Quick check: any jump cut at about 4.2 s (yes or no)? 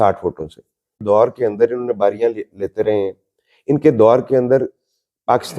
no